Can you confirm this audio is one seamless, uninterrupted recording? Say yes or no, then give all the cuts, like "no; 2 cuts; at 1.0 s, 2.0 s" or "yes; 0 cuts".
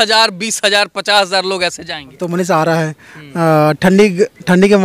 no; 1 cut; at 2.2 s